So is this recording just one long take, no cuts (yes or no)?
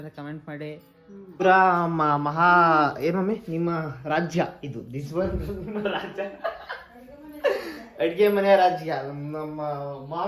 no